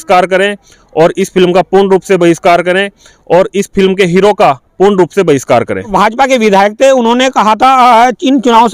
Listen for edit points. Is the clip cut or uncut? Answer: cut